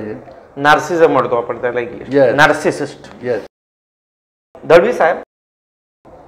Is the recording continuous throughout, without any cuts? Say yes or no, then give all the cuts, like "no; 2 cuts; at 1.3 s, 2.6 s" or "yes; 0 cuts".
yes; 0 cuts